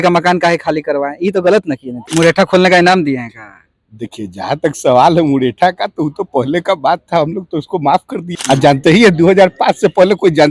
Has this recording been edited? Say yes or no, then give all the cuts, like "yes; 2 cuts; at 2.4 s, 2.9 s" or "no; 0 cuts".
yes; 2 cuts; at 2.0 s, 8.3 s